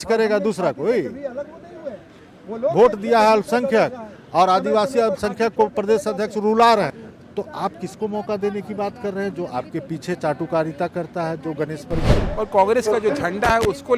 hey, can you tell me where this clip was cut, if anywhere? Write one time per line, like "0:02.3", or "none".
0:07.0
0:12.2